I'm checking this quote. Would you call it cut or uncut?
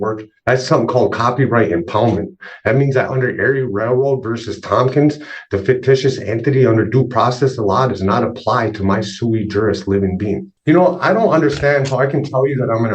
cut